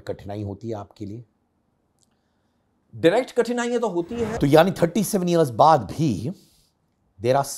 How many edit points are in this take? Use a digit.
1